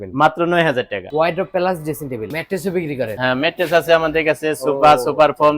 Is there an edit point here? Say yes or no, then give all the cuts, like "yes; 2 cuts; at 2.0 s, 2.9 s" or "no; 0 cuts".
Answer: yes; 2 cuts; at 1.1 s, 2.3 s